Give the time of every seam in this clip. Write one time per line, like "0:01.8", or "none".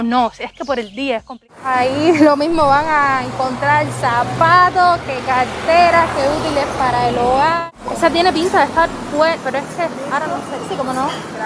0:01.5
0:07.6